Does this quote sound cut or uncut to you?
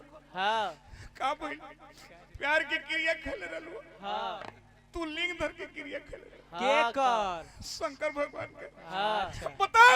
uncut